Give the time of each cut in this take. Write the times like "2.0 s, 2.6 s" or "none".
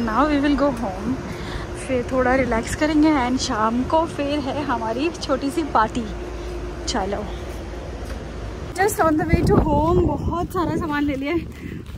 none